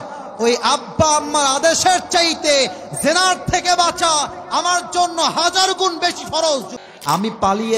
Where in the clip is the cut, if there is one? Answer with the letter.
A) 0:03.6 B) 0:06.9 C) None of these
B